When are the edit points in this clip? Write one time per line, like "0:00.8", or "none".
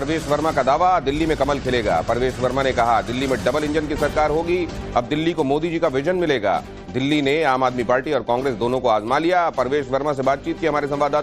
0:09.5